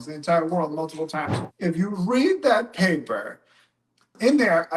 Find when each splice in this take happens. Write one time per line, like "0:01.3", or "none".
0:01.4